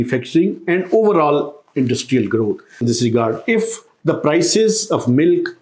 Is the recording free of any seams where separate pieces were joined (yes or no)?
no